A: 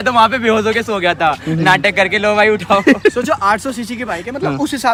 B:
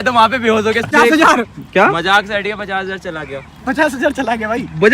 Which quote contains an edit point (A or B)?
B